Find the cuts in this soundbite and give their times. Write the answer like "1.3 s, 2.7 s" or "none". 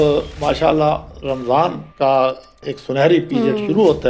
1.8 s, 2.7 s